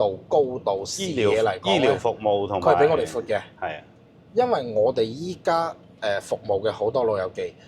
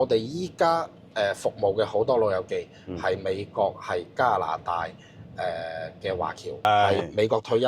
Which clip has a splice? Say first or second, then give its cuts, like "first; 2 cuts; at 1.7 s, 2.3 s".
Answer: second; 1 cut; at 6.6 s